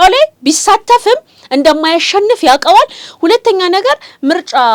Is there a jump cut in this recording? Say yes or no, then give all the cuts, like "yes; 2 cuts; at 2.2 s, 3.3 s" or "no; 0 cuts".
no; 0 cuts